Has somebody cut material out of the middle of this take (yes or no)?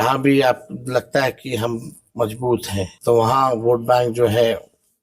yes